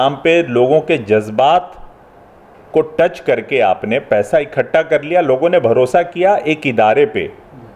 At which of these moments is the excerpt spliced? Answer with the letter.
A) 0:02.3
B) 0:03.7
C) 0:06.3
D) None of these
D